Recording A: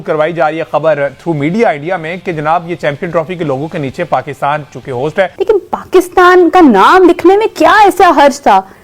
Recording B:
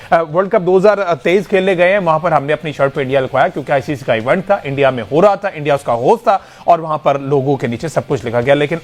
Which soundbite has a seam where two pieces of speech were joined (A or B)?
A